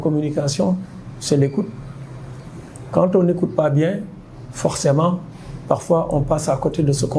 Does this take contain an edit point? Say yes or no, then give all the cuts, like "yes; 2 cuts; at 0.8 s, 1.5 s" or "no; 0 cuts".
no; 0 cuts